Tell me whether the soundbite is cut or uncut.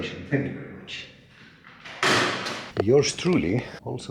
cut